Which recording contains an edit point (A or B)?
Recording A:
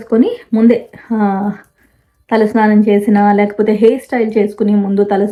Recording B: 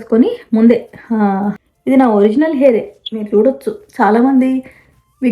B